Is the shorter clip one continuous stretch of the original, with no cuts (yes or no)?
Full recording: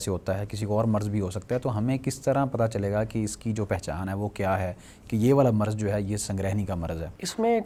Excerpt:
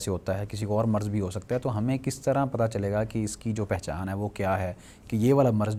yes